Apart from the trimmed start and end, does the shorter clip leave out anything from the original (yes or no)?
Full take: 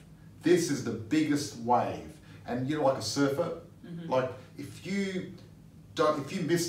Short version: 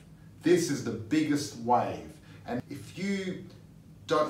yes